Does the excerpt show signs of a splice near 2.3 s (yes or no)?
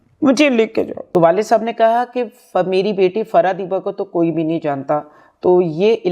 no